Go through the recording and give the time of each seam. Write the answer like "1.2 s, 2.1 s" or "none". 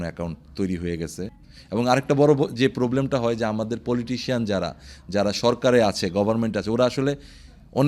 1.3 s